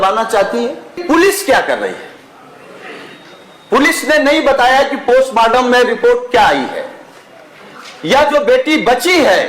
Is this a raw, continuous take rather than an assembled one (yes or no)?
no